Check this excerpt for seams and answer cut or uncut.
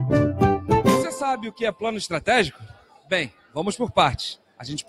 cut